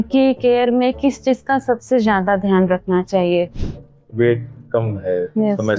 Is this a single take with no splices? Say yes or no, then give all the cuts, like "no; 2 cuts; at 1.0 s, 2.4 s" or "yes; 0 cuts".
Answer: no; 1 cut; at 3.5 s